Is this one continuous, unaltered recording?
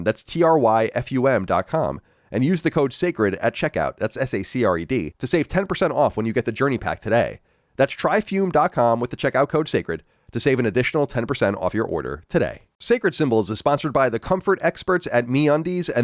no; 1 cut; at 12.7 s

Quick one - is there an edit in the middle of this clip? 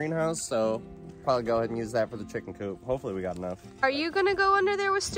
yes; 1 cut; at 3.7 s

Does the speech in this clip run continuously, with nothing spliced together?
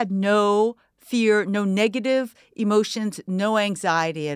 yes; 0 cuts

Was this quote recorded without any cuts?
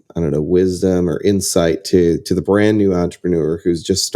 yes; 0 cuts

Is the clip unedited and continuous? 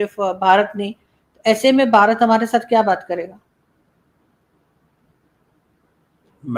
yes; 0 cuts

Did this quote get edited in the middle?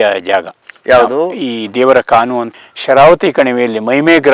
yes; 1 cut; at 2.5 s

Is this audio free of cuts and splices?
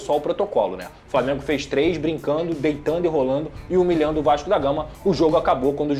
yes; 0 cuts

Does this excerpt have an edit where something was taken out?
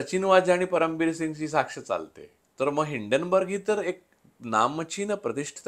yes; 1 cut; at 2.5 s

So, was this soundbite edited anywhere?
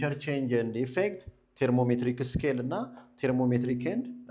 no; 0 cuts

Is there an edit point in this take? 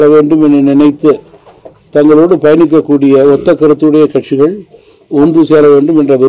no; 0 cuts

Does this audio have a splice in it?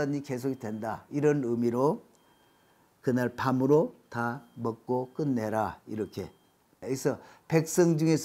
no; 0 cuts

